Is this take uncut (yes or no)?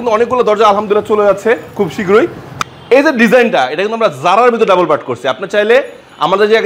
no